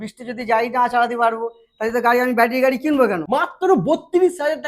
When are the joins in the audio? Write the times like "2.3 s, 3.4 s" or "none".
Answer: 3.2 s